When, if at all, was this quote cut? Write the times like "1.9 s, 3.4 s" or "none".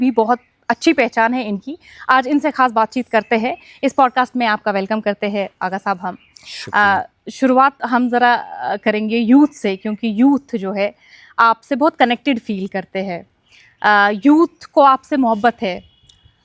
none

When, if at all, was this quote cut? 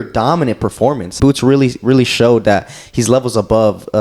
1.1 s

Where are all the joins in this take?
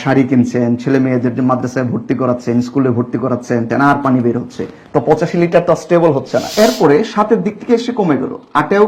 3.7 s, 6.5 s

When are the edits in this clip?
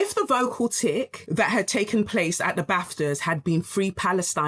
1.2 s

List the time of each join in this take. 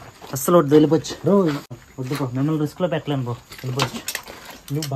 1.7 s

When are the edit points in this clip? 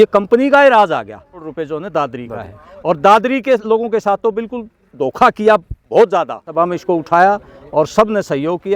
1.4 s, 6.5 s

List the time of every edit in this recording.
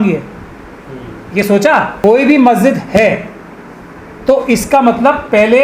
1.9 s

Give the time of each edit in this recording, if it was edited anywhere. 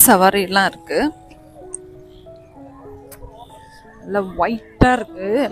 none

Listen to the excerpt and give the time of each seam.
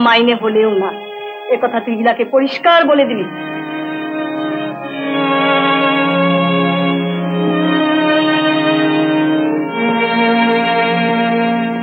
none

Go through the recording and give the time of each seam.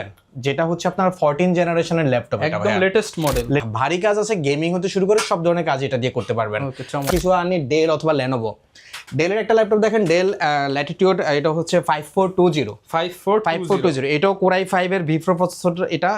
3.6 s, 7.1 s

